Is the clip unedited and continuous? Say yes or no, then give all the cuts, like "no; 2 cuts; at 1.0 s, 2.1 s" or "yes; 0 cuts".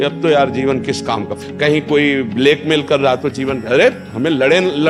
yes; 0 cuts